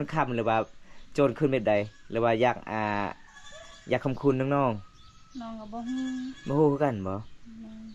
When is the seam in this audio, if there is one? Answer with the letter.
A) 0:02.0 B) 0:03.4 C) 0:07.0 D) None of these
D